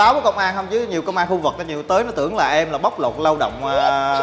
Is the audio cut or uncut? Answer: uncut